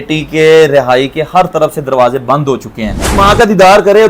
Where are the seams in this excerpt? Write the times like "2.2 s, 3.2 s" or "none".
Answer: 3.2 s